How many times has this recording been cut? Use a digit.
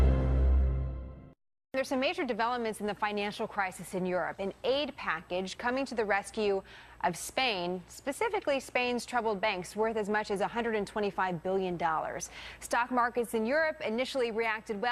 1